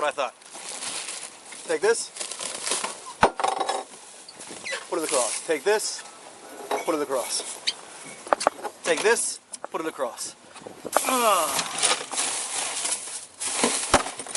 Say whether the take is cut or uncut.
uncut